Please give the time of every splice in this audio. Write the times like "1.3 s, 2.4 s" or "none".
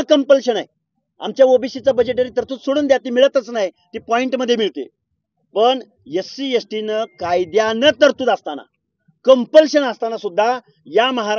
none